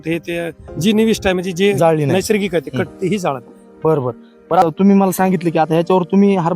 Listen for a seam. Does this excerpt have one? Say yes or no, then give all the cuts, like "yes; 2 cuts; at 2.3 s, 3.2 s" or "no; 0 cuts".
yes; 1 cut; at 4.6 s